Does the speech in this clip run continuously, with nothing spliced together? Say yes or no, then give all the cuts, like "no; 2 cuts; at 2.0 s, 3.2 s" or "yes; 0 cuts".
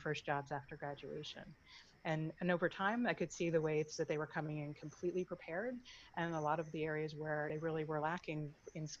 no; 1 cut; at 7.5 s